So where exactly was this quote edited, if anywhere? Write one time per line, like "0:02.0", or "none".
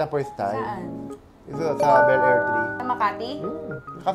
0:02.7

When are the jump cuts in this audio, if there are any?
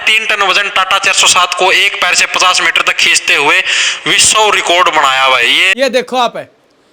0:05.5

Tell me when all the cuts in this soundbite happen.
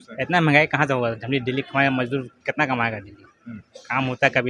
none

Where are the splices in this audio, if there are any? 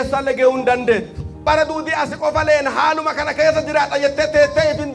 0:01.4

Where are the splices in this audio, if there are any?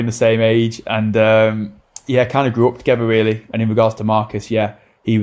0:03.4

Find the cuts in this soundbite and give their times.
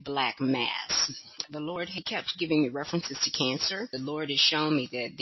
0:03.9

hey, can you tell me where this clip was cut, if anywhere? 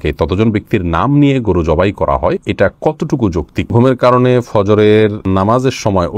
0:02.4
0:03.7
0:05.2

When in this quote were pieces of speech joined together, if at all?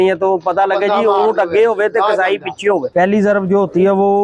0:02.9

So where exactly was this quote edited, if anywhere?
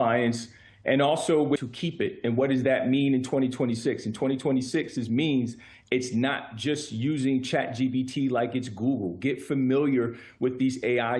0:01.7

